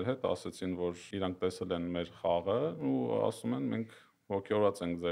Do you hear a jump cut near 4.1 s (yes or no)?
no